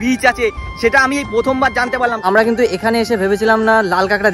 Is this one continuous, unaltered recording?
no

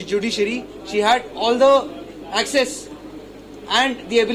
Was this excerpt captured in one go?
yes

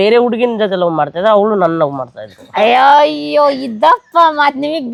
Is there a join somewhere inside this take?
no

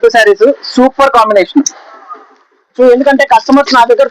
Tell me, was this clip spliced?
yes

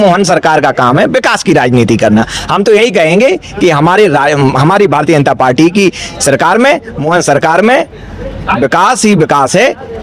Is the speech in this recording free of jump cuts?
yes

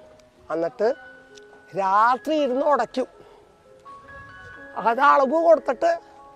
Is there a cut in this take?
no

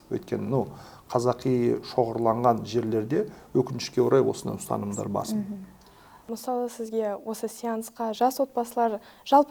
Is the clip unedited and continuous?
yes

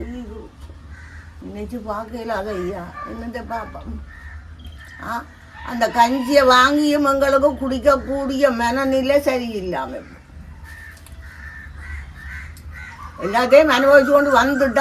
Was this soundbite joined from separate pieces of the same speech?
no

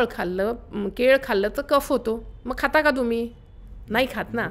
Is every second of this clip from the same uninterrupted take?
yes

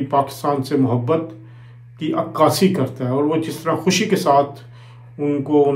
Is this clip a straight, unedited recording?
yes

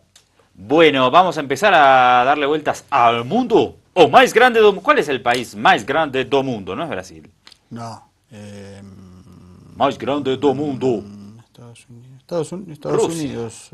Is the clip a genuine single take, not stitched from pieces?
no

